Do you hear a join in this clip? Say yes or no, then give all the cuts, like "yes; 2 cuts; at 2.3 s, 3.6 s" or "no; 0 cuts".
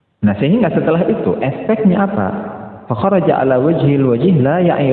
no; 0 cuts